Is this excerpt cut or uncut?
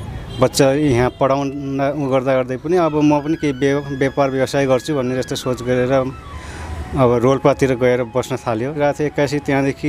cut